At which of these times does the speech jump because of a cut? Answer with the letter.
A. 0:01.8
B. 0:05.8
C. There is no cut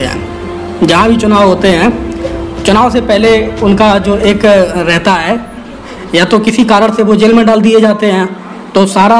C